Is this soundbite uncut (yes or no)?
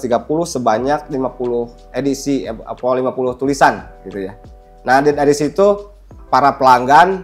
no